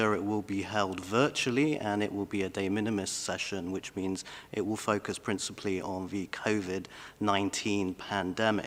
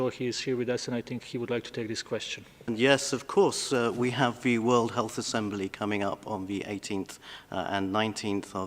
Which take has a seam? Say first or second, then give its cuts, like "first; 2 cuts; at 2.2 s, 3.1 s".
second; 1 cut; at 2.6 s